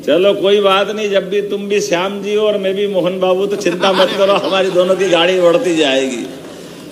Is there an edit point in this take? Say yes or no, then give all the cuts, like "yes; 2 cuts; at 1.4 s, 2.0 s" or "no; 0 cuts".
no; 0 cuts